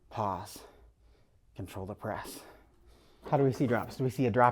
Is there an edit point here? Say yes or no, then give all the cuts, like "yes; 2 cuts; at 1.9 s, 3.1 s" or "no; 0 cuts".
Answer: yes; 1 cut; at 3.2 s